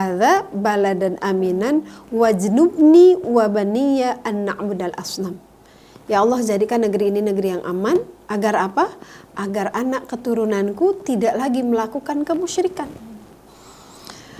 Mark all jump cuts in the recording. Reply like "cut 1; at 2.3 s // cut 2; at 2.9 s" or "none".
none